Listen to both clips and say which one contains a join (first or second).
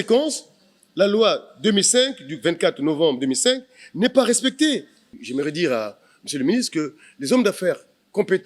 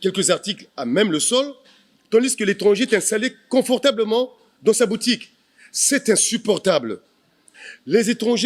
first